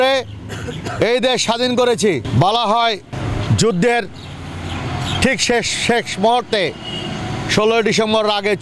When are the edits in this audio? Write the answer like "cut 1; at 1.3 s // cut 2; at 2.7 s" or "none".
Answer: cut 1; at 2.3 s // cut 2; at 3.1 s

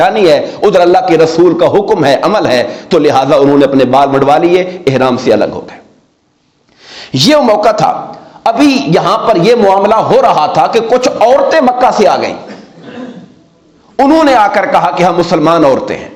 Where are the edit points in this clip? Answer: none

